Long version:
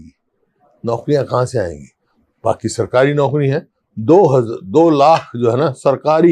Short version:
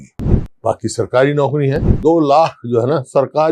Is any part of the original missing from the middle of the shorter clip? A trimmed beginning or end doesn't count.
yes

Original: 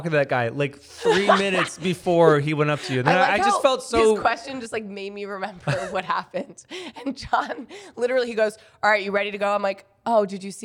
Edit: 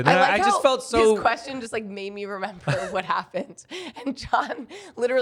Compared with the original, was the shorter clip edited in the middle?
no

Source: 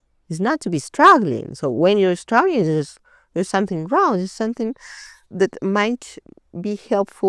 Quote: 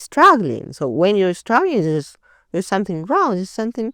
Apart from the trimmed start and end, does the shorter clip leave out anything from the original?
no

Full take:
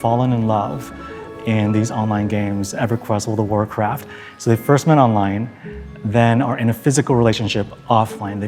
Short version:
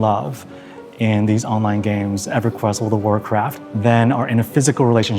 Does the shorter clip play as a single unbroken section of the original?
no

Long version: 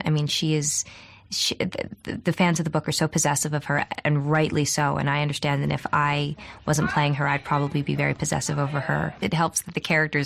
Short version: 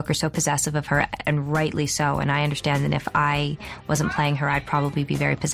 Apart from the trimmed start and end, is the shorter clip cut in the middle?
no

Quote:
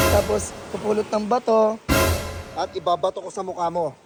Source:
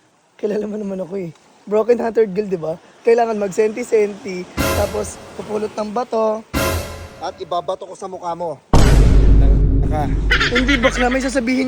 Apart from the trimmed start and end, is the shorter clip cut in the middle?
no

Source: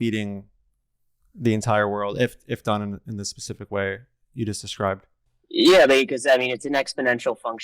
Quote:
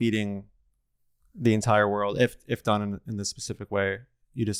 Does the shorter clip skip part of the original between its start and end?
no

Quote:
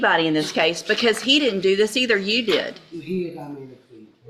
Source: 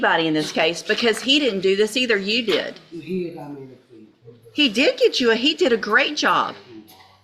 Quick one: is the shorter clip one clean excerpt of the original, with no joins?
yes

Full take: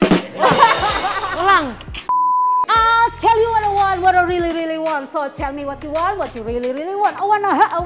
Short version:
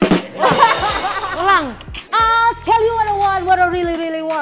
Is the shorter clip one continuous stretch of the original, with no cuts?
no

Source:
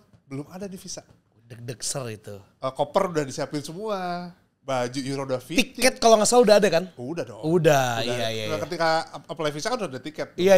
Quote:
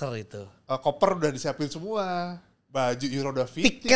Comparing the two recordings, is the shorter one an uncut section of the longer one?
yes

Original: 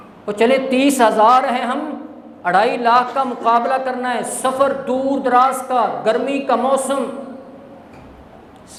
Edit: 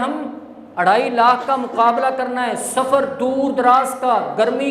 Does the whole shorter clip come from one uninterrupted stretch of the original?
yes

